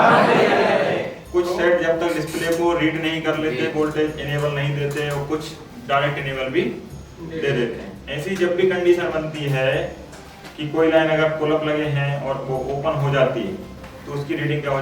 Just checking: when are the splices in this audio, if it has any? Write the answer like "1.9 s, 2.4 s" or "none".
1.1 s, 8.0 s